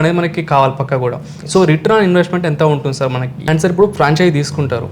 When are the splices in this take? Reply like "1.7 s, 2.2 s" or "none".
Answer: 3.4 s